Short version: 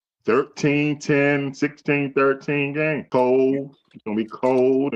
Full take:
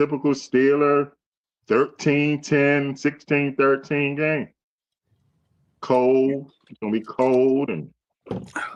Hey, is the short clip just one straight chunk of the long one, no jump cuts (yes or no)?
no